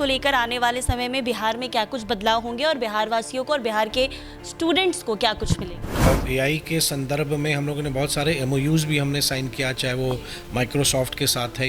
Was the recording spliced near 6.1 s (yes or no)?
yes